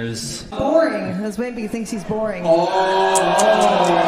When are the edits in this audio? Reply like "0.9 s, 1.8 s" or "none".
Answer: none

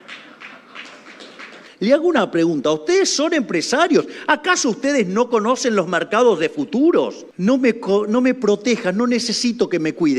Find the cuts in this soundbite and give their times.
1.6 s, 7.2 s

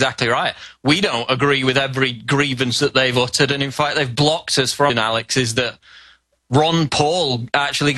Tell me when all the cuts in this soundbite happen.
none

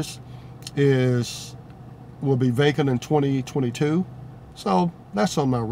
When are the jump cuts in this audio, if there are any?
none

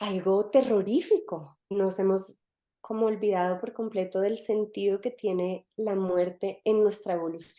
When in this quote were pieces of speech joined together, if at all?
1.7 s

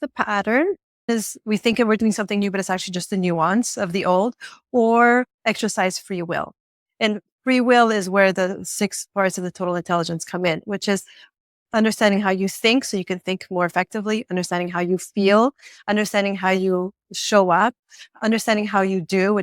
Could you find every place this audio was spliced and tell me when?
1.1 s

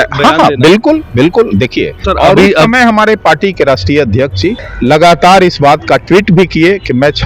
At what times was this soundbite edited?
2.0 s, 4.7 s

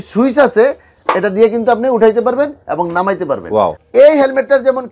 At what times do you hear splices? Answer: 3.8 s

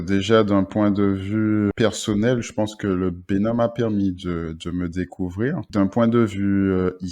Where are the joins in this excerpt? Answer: 1.7 s

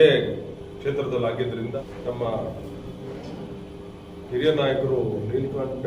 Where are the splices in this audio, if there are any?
1.8 s

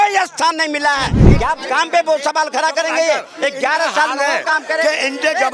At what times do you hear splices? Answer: 1.2 s

